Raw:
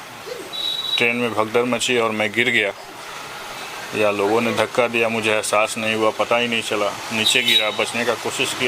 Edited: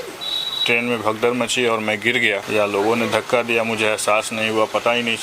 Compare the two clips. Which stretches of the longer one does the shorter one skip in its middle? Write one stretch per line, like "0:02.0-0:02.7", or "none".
0:02.8-0:03.9